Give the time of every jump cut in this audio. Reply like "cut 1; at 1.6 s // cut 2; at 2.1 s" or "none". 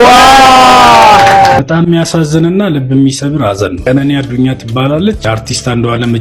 cut 1; at 1.6 s